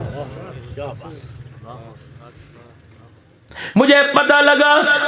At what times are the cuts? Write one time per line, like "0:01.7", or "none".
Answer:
0:03.0